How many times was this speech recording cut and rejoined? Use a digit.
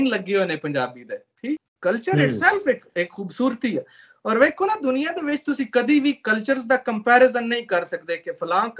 1